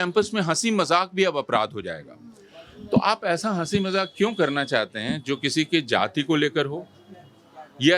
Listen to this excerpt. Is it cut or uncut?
uncut